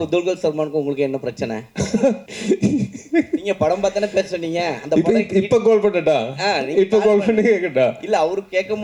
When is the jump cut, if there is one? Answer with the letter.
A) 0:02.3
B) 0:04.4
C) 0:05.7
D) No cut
A